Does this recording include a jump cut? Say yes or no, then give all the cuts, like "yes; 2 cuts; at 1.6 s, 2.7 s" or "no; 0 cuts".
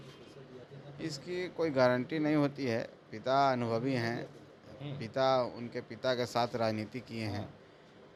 no; 0 cuts